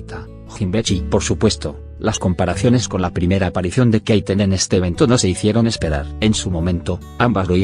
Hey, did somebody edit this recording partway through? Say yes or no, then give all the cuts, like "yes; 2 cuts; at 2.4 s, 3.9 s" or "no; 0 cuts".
yes; 1 cut; at 2.9 s